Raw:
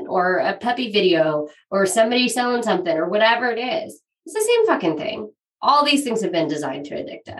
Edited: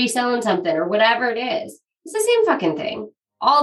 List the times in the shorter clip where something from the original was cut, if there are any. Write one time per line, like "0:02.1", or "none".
none